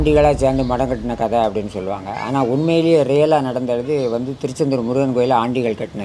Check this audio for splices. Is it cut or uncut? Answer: uncut